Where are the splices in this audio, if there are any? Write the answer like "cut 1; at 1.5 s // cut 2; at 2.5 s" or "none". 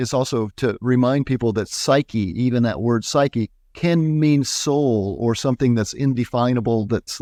none